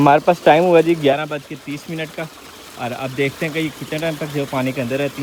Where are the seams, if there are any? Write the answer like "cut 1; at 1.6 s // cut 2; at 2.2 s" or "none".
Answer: none

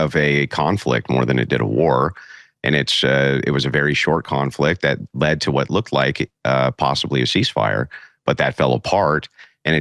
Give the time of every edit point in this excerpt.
none

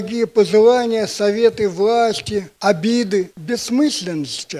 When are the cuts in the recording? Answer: cut 1; at 2.5 s // cut 2; at 3.4 s

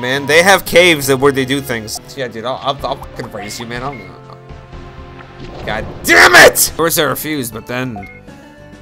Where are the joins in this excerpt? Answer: cut 1; at 1.9 s // cut 2; at 6.6 s

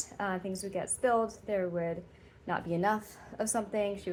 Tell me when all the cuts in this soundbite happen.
none

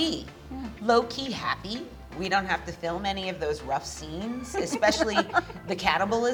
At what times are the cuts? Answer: none

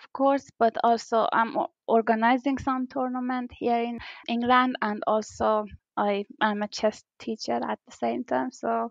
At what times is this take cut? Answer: cut 1; at 4.2 s // cut 2; at 5.8 s

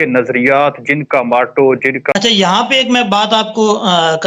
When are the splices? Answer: cut 1; at 2.1 s

